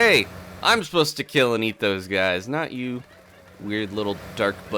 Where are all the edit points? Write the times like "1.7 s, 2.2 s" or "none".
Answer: none